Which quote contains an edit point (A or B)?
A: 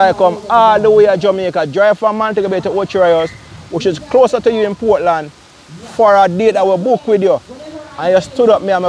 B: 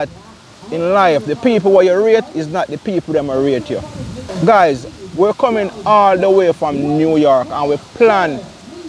B